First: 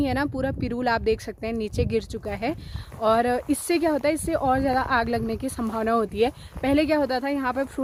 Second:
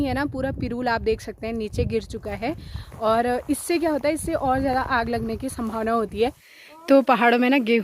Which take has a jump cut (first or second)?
second